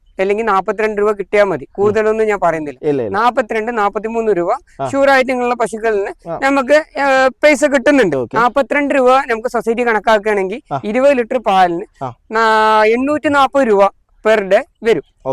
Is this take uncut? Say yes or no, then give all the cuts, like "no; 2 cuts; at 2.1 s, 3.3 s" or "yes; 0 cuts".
yes; 0 cuts